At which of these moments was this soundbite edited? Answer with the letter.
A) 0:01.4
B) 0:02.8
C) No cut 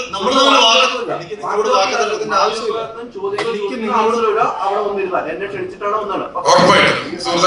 C